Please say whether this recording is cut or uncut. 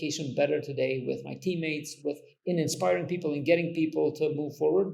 uncut